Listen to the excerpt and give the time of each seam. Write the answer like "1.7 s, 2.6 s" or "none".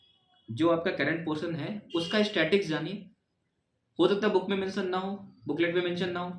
none

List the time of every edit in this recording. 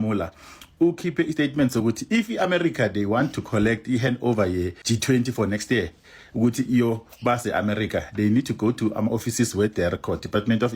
none

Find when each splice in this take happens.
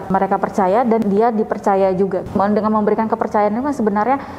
1.0 s, 2.3 s

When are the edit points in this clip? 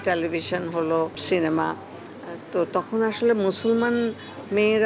1.2 s

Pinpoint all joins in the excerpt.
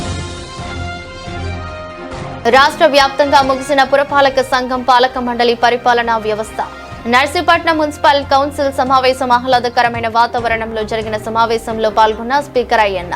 1.9 s

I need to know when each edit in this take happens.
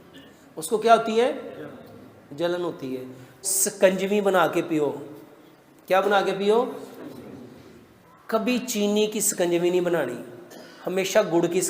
3.4 s

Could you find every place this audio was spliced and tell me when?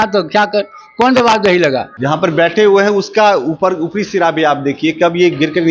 1.9 s

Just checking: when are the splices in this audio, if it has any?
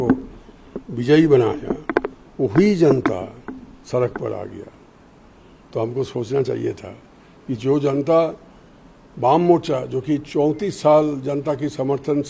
none

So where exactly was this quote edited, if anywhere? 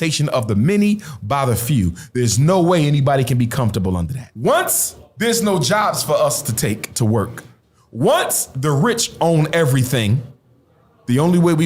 4.2 s

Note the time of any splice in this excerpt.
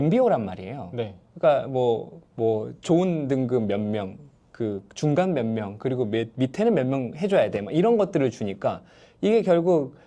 2.2 s

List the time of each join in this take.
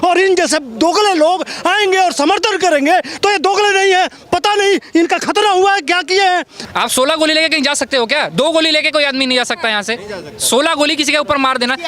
6.5 s

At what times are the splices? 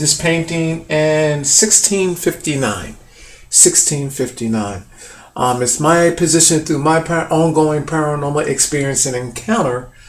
5.2 s

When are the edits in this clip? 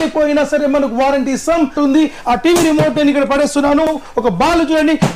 1.7 s, 3.9 s

